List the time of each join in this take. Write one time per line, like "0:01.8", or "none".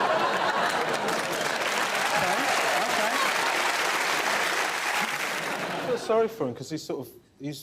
0:05.5